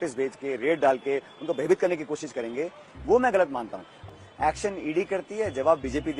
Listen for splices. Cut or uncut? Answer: cut